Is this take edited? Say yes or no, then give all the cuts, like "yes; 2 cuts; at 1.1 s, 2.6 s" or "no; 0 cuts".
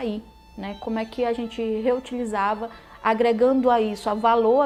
no; 0 cuts